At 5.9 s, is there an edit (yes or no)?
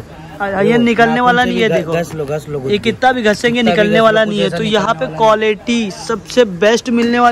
no